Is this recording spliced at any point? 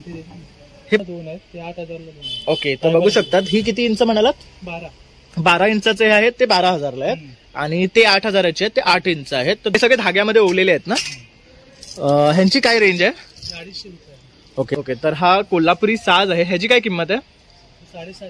yes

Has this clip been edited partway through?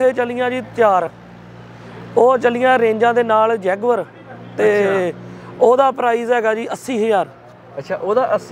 no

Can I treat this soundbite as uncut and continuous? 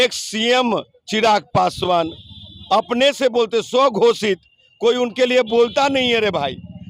yes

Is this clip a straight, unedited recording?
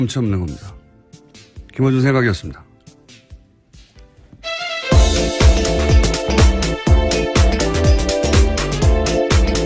no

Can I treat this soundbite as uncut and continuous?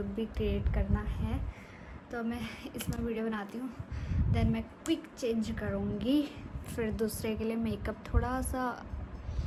yes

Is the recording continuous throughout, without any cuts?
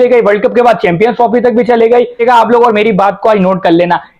no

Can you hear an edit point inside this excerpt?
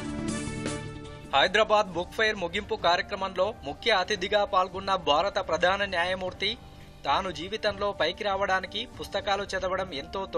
yes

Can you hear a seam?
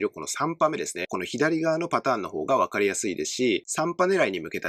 yes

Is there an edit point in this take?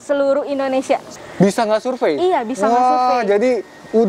yes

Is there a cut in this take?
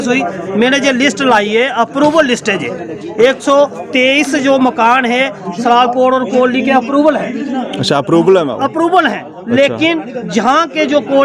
no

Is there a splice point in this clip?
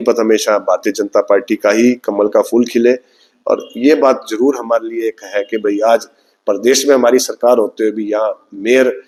no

